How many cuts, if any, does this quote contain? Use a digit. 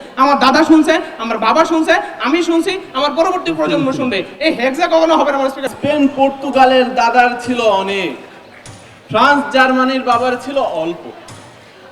1